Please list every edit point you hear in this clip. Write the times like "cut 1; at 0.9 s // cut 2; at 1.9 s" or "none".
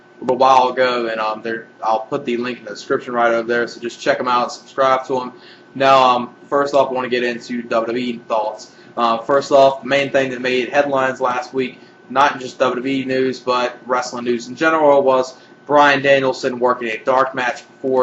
cut 1; at 6.6 s